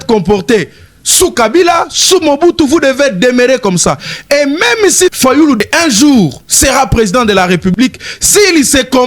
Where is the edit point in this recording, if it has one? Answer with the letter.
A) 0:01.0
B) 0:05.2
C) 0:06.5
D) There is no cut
B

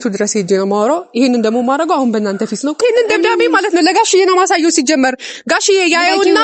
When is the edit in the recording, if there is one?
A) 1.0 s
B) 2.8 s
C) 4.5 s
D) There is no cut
B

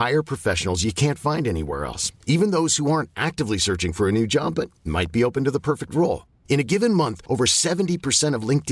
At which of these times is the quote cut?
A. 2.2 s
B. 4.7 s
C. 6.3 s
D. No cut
D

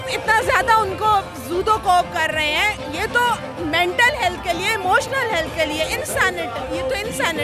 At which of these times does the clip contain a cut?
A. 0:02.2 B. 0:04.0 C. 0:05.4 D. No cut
D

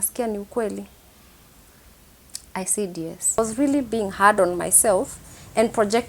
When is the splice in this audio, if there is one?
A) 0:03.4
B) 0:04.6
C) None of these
A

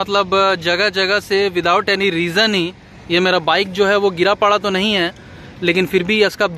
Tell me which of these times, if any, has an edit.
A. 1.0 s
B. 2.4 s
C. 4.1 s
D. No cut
D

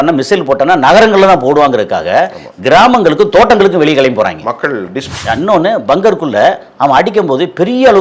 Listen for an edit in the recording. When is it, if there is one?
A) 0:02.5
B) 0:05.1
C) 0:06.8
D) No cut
B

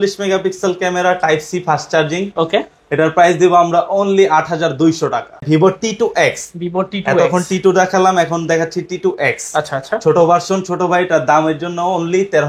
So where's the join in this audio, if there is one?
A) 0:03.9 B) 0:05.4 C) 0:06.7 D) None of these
B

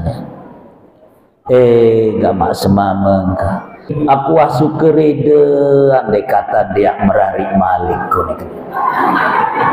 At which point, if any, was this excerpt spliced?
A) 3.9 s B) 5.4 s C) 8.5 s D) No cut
A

